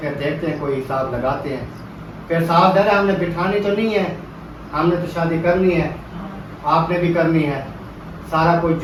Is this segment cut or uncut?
uncut